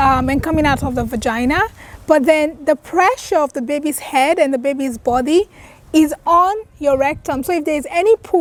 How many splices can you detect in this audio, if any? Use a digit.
0